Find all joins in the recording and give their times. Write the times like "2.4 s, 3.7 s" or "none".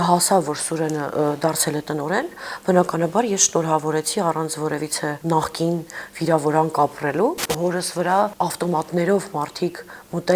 5.2 s, 7.5 s, 8.3 s